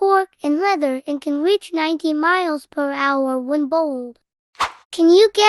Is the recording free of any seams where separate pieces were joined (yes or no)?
no